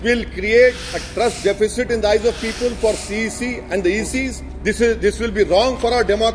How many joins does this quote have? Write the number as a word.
one